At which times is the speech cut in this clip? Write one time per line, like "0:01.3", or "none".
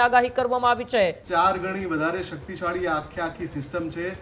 0:01.2